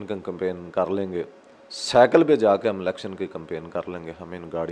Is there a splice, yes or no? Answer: no